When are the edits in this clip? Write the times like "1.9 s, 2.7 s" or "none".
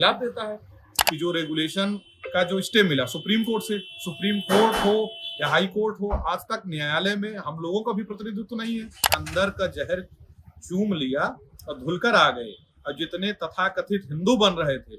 0.9 s, 9.1 s